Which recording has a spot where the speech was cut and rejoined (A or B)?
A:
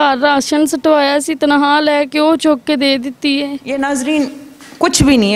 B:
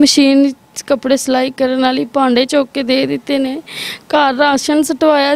A